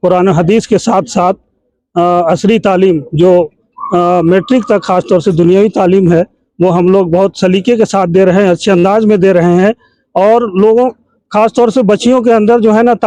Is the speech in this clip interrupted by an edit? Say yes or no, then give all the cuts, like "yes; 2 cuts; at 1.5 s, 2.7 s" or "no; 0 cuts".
no; 0 cuts